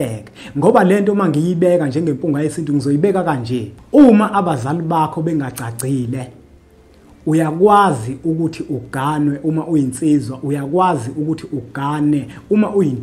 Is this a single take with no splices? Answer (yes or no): no